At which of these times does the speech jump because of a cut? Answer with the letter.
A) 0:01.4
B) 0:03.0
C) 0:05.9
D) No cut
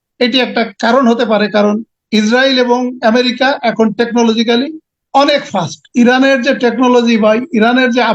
C